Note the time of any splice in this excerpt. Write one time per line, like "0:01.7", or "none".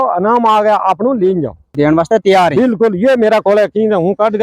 0:01.7